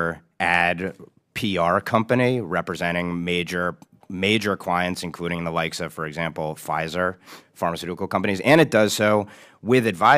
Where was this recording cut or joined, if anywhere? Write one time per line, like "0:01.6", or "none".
none